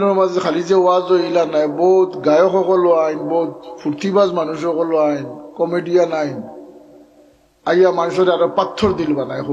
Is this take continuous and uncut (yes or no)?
yes